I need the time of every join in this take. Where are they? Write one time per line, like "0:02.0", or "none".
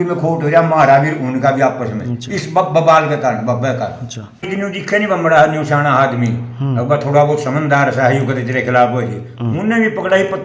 0:04.4